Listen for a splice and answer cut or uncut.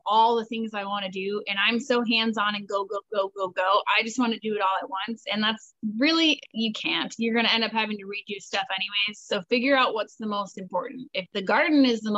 uncut